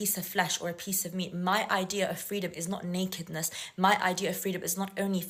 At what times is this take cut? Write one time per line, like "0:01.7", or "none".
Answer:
none